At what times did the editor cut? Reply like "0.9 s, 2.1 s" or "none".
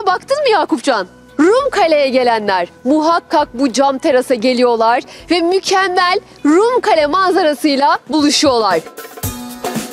1.2 s, 8.9 s